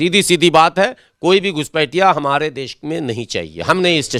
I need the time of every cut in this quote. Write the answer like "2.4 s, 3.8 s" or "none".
none

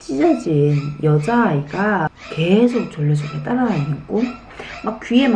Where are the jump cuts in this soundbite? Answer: 2.2 s, 4.4 s

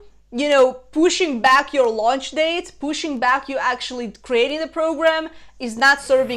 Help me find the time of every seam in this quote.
none

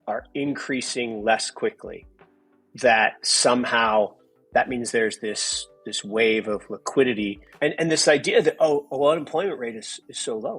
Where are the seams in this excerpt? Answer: 7.4 s

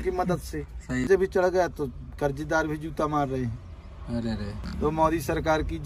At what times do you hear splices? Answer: 1.0 s, 4.6 s

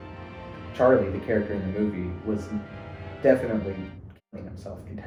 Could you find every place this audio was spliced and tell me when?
none

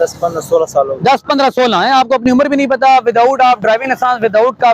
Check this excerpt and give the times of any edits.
none

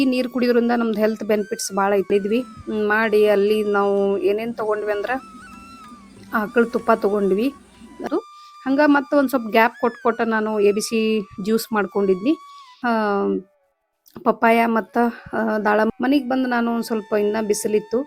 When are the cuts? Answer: 2.1 s, 8.1 s, 12.8 s, 15.9 s

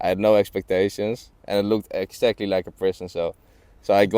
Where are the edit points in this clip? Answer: 1.3 s

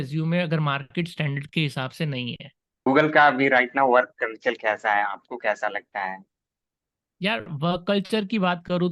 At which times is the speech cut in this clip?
2.9 s

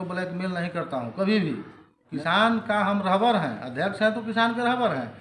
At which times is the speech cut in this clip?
2.1 s

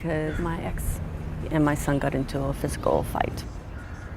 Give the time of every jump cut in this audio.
2.6 s

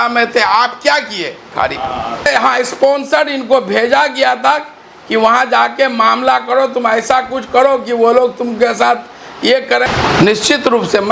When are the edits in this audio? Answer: 2.3 s, 9.8 s

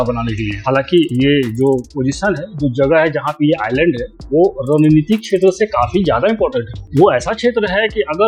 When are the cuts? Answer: none

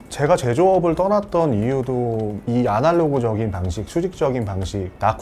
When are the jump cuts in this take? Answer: 2.4 s

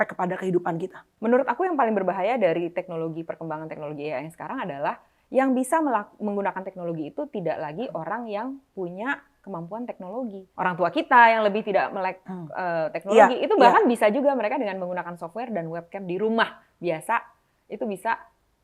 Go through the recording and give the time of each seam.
1.0 s, 10.4 s

